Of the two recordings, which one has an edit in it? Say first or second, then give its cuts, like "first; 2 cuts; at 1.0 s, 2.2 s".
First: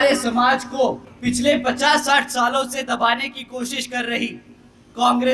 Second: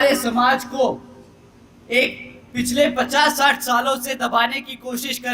first; 1 cut; at 1.1 s